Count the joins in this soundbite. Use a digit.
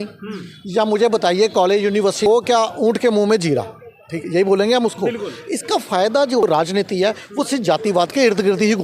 2